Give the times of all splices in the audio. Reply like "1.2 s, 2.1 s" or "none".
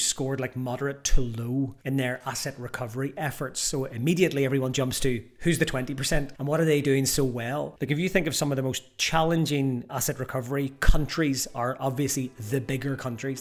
none